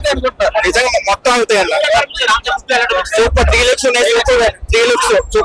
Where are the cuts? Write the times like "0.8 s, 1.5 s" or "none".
none